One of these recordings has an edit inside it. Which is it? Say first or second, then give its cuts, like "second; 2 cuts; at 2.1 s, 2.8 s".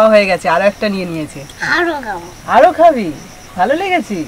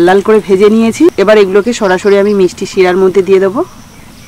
second; 1 cut; at 1.1 s